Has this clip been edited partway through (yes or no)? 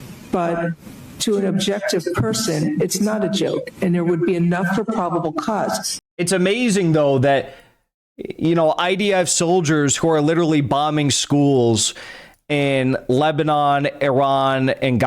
yes